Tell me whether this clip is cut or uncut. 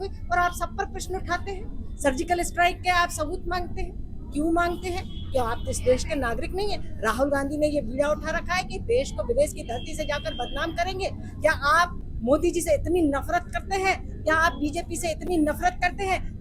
uncut